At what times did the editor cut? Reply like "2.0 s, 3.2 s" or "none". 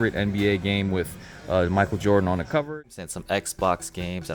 2.7 s